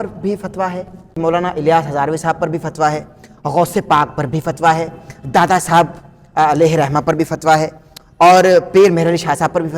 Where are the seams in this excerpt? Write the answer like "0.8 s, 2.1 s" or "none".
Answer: 1.2 s